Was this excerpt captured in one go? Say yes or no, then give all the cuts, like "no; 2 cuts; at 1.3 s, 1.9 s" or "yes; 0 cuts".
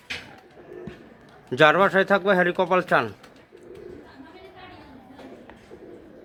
yes; 0 cuts